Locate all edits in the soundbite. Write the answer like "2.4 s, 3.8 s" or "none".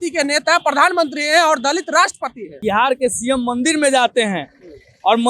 2.6 s